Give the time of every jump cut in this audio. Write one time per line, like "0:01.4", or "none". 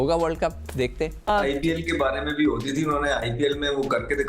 0:01.1